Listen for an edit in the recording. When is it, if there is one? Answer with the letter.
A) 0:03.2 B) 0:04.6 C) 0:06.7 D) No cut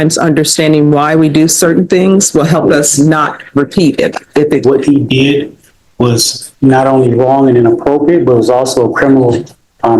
B